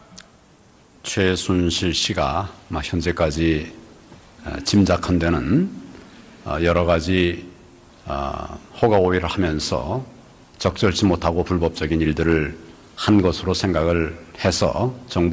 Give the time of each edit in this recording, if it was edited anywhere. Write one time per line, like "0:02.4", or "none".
0:12.9